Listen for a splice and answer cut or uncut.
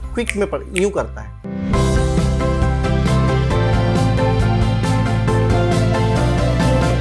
uncut